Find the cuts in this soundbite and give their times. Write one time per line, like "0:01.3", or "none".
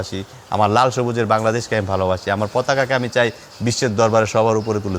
none